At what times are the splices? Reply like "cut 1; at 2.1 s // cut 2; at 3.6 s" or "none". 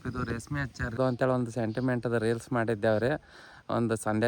cut 1; at 1.0 s